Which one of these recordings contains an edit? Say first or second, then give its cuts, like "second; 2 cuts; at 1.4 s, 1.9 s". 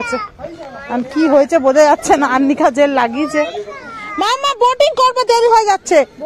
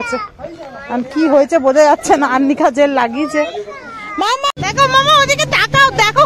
second; 1 cut; at 4.6 s